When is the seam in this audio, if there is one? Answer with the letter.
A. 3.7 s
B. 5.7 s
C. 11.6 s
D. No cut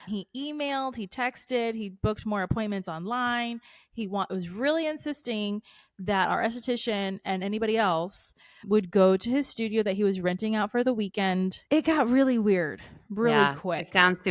C